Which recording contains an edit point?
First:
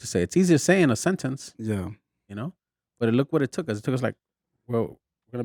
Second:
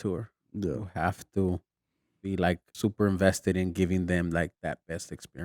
second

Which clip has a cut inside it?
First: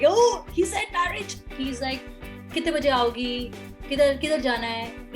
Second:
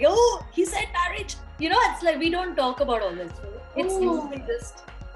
first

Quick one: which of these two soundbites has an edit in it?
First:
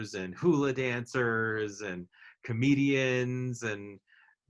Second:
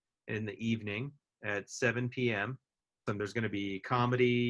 second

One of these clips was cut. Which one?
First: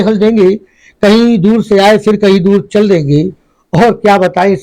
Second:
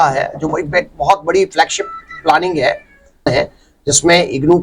second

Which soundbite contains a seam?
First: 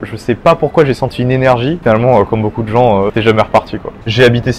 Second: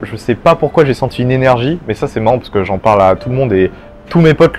first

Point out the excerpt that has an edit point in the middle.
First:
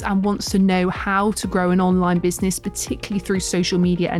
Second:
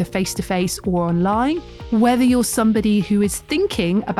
second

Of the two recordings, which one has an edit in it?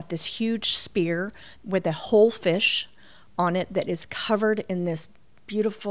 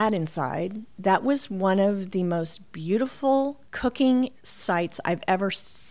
second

